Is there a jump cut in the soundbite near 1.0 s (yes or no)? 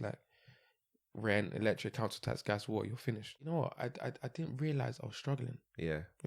no